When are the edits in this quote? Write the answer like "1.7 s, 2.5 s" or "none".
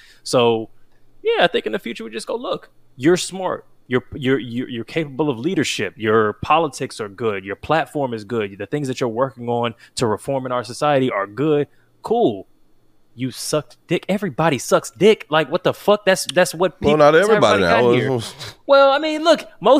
none